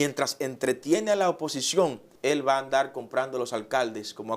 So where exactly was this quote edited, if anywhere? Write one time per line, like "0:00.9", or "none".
0:02.1

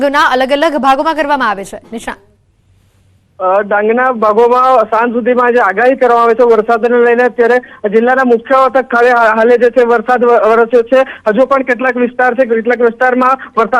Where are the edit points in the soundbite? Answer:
0:07.1

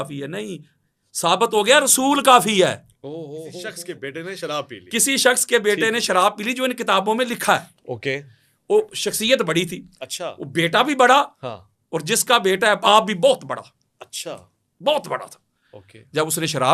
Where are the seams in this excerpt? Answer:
0:03.7

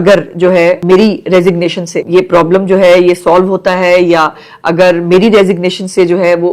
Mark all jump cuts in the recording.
0:00.8
0:01.9

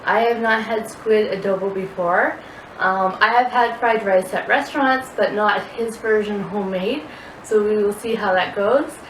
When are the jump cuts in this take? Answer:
none

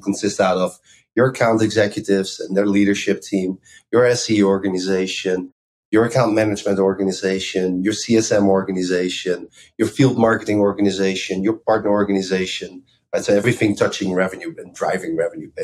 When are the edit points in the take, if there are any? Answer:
0:09.6
0:11.6
0:13.4

